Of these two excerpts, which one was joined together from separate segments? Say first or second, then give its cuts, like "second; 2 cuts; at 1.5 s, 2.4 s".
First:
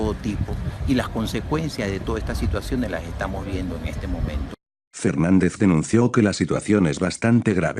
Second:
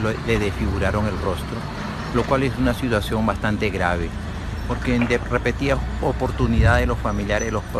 second; 1 cut; at 6.5 s